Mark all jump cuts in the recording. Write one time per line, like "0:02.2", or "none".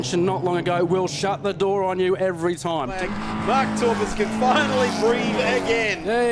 0:03.0